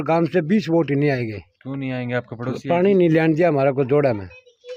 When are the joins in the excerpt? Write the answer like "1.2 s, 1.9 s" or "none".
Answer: none